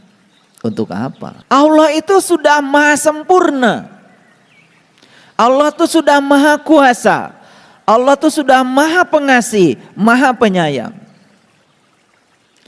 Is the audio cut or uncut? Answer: cut